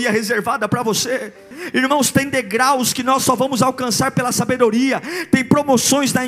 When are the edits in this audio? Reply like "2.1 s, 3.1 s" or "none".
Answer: 1.6 s